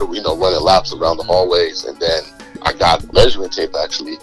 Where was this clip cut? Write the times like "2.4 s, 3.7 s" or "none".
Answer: 3.1 s